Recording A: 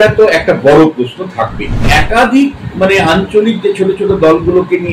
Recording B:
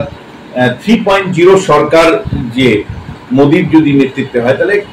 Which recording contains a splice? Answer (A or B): A